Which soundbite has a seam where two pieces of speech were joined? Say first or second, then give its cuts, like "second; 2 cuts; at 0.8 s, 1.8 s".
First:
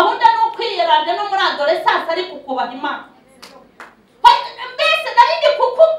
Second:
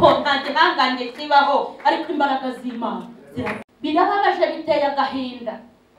second; 1 cut; at 3.6 s